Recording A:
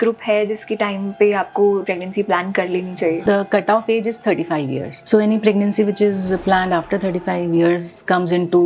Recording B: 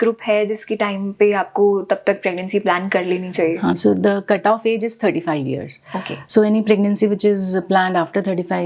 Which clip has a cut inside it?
A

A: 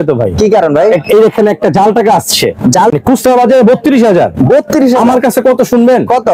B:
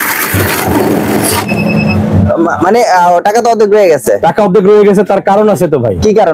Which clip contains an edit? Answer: A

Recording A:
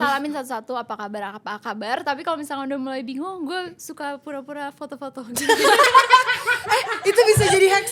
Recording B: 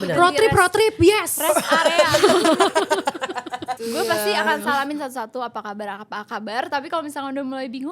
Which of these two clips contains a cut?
B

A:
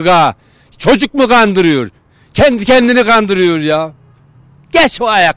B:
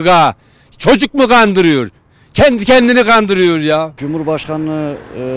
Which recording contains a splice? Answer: B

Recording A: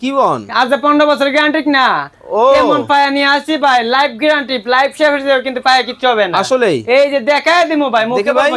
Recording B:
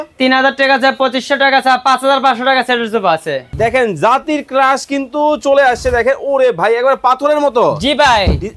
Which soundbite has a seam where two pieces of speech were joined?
B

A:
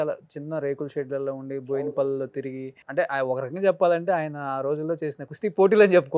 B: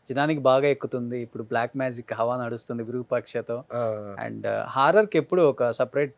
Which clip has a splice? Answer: A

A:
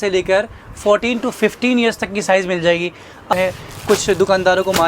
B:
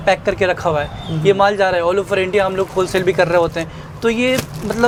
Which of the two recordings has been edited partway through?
A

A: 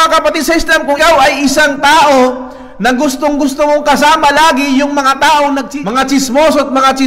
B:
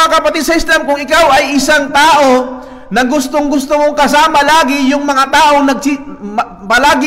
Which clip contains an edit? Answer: A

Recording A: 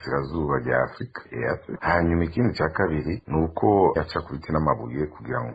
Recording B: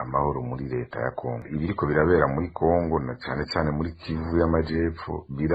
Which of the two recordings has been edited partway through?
B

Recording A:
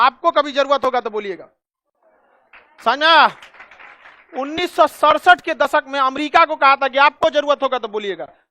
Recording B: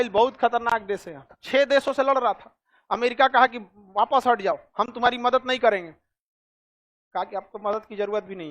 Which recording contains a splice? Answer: B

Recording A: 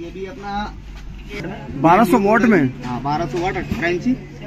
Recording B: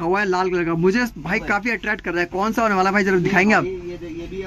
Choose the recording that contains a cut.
A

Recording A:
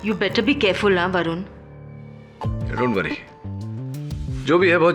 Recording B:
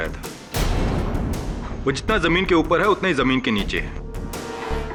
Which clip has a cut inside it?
A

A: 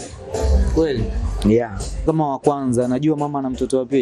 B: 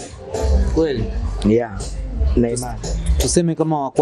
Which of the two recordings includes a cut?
A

